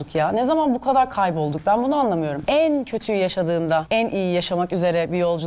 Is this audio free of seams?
no; 2 cuts; at 2.4 s, 3.9 s

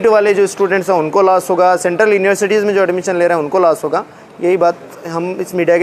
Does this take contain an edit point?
no; 0 cuts

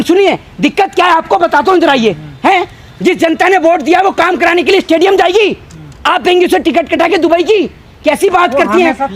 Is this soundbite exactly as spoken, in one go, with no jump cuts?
yes; 0 cuts

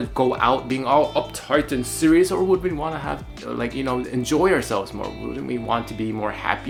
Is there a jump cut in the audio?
no; 0 cuts

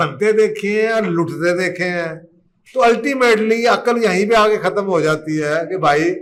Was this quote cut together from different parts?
no; 0 cuts

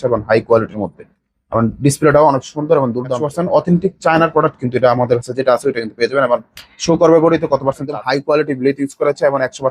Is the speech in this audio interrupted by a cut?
yes; 2 cuts; at 3.2 s, 7.8 s

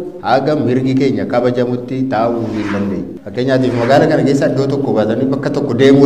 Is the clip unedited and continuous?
no; 1 cut; at 3.2 s

